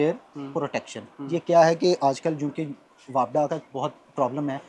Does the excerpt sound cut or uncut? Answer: uncut